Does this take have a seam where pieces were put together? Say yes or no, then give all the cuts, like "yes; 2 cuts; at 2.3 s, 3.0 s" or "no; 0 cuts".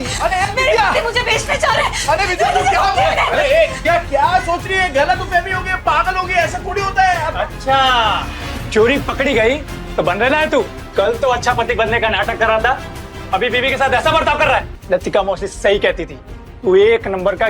yes; 1 cut; at 14.7 s